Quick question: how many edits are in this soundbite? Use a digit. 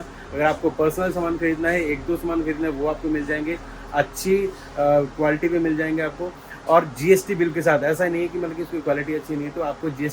0